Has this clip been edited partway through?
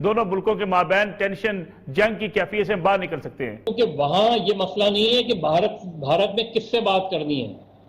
yes; 1 cut; at 3.6 s

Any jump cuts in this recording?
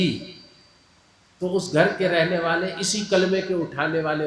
no; 0 cuts

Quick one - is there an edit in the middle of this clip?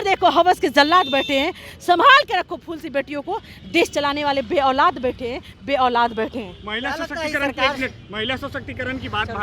no; 0 cuts

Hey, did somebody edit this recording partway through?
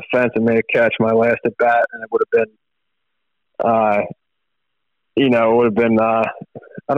no; 0 cuts

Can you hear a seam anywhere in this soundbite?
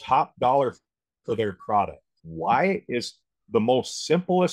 no; 0 cuts

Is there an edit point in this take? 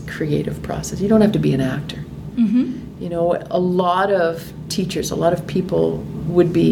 no; 0 cuts

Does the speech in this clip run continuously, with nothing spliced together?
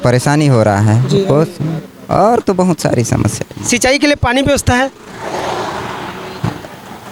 yes; 0 cuts

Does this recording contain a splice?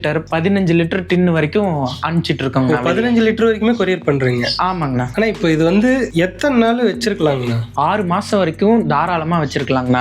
yes; 3 cuts; at 5.0 s, 6.1 s, 7.7 s

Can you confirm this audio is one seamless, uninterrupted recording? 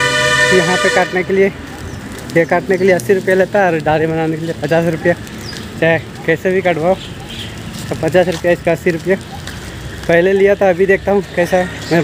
yes; 0 cuts

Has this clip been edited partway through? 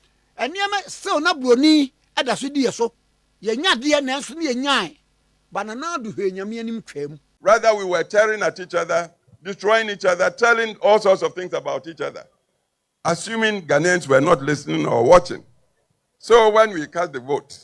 yes; 1 cut; at 7.2 s

